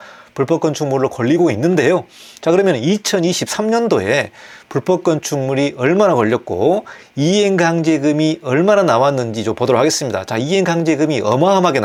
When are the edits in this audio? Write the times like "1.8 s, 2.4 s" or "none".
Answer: none